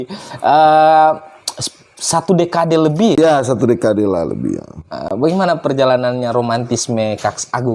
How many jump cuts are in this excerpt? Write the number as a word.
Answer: one